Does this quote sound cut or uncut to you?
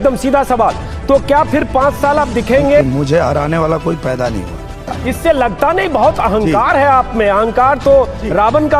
cut